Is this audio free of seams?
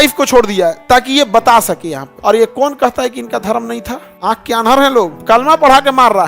no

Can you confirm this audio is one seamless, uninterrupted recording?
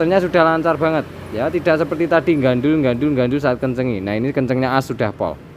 yes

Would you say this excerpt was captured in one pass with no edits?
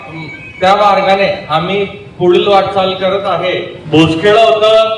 no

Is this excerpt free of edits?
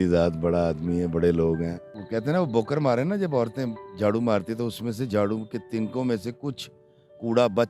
yes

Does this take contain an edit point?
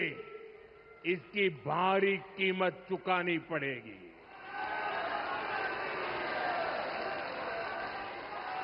no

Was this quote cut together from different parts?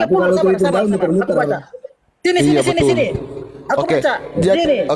no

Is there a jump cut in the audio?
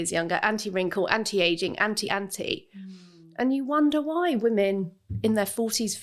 no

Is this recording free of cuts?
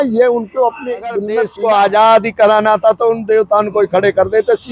no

